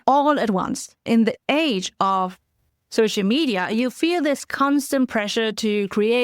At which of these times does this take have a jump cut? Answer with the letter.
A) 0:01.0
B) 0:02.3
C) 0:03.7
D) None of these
A